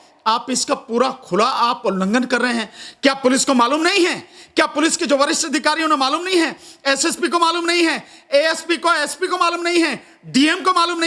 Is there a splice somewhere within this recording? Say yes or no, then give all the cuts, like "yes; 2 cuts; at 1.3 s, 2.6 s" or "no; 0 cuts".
no; 0 cuts